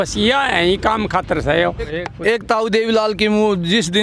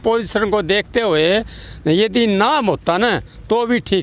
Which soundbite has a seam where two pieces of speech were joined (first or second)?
first